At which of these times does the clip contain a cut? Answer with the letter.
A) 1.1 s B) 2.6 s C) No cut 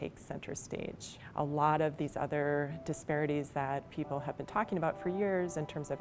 A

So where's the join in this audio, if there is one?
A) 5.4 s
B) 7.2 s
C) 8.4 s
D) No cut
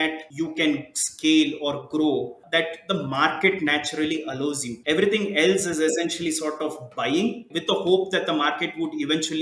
D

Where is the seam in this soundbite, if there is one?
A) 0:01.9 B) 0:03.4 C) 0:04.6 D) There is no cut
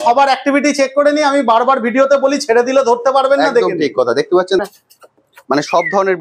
C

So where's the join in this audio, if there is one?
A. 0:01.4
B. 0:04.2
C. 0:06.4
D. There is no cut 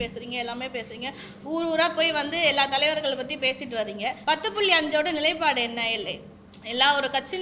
B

